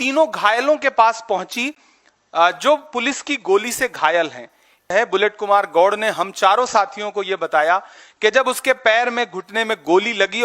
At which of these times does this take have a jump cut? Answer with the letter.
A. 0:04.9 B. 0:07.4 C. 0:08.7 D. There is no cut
A